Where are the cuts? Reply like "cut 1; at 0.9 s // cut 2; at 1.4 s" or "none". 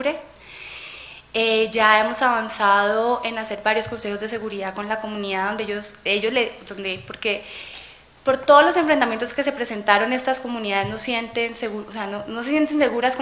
cut 1; at 9.7 s